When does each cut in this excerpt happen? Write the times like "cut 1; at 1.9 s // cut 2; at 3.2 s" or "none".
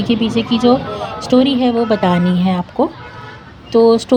none